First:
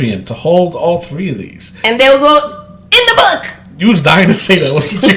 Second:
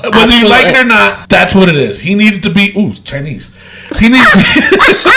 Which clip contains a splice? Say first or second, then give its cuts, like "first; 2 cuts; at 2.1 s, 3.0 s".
second; 1 cut; at 1.2 s